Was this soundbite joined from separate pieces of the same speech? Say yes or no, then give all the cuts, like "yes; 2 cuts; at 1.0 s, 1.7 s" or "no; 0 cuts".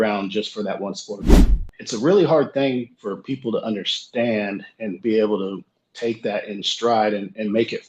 yes; 1 cut; at 1.5 s